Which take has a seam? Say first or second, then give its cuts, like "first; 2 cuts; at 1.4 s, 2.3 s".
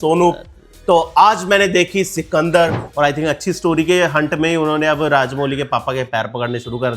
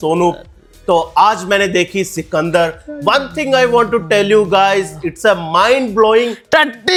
first; 1 cut; at 2.8 s